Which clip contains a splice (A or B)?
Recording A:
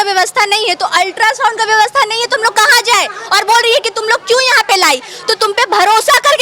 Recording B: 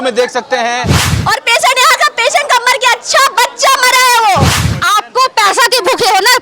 B